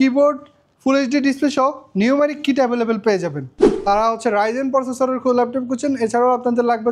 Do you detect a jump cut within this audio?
yes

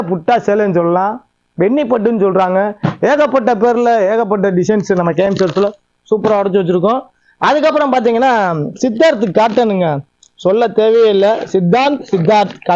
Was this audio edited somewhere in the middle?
no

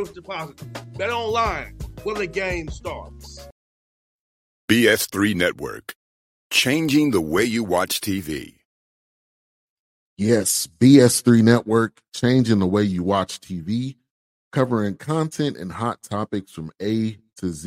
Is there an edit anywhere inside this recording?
yes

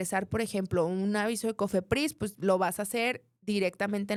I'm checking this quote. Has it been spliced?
no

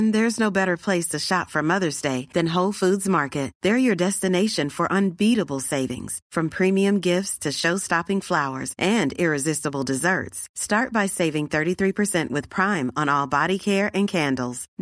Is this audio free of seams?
yes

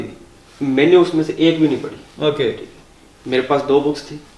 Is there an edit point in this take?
no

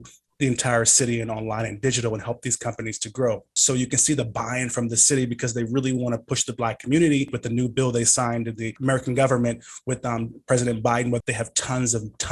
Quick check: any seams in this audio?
yes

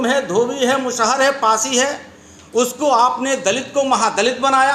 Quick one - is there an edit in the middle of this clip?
no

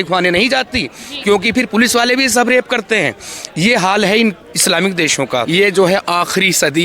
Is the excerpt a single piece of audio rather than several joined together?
no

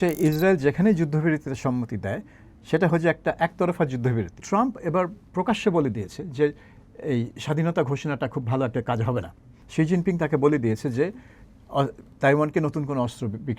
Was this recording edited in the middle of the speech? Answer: yes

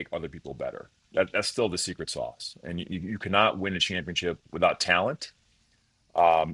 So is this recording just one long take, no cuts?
yes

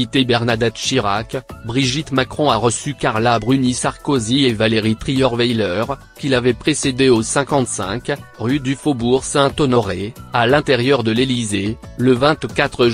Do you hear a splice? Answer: no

